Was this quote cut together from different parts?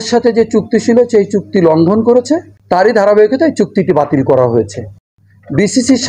yes; 2 cuts; at 2.5 s, 5.1 s

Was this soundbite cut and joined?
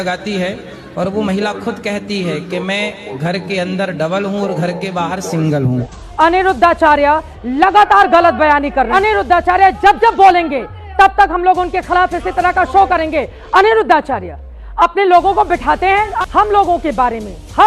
yes; 3 cuts; at 6.0 s, 8.9 s, 16.1 s

